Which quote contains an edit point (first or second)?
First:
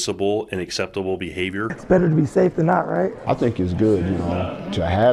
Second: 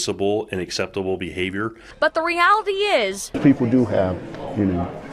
first